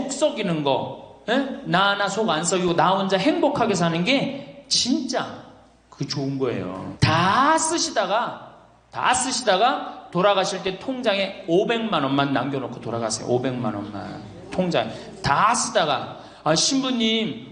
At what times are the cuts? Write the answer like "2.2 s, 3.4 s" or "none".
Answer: 6.9 s